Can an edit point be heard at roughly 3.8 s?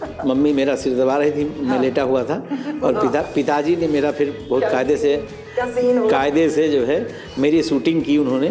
no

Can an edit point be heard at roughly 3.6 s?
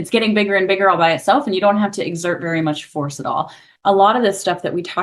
yes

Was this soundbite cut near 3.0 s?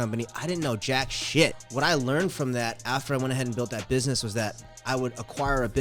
no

